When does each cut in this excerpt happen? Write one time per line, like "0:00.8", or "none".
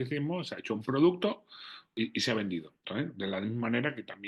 0:01.9
0:02.8